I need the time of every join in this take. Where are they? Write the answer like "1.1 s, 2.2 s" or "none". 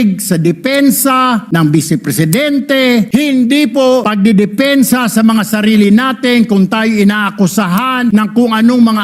1.4 s, 3.1 s, 4.1 s, 8.1 s